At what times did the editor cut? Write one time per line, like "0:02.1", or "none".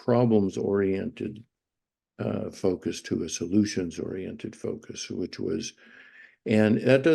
none